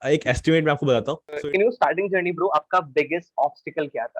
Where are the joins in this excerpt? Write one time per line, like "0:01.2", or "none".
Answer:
0:01.4

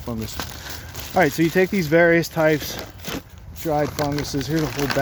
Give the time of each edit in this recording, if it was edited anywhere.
none

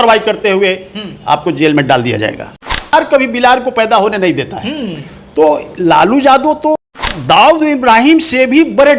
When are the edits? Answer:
0:02.9
0:07.1

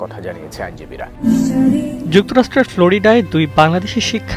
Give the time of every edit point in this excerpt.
0:01.2

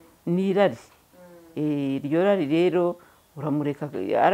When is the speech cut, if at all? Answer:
none

